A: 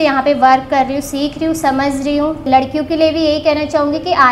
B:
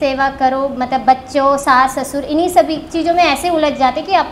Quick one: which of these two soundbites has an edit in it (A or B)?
A